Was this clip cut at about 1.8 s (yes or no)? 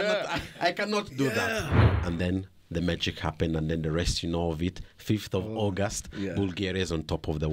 yes